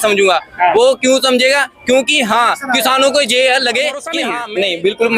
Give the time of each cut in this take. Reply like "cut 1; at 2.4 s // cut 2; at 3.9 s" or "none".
cut 1; at 4.2 s